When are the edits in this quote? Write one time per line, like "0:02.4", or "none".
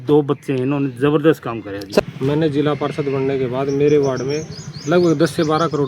0:02.0